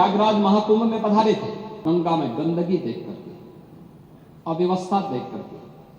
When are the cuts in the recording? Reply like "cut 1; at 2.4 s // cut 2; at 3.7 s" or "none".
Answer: cut 1; at 1.8 s

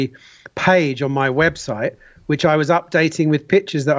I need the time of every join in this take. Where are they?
none

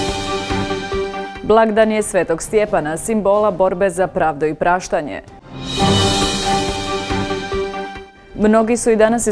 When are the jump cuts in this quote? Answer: cut 1; at 1.2 s

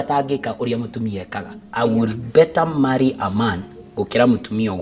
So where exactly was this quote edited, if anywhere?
cut 1; at 1.6 s

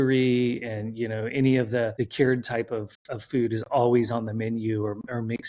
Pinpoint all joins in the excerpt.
cut 1; at 1.9 s

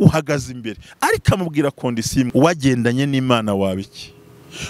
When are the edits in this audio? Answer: cut 1; at 2.3 s

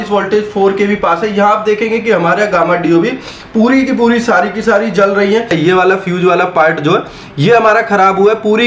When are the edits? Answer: cut 1; at 5.5 s

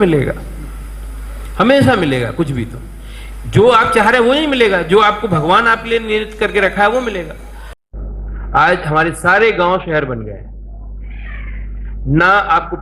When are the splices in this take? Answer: cut 1; at 7.7 s

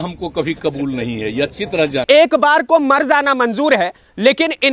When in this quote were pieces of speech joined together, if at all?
cut 1; at 2.0 s

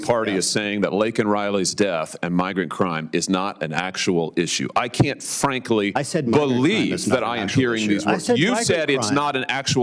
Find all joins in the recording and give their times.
cut 1; at 1.2 s

